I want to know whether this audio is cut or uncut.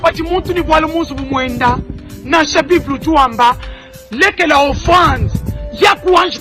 cut